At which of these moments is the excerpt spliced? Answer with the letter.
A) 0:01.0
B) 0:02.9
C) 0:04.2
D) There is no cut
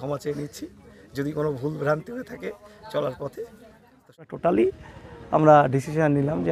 C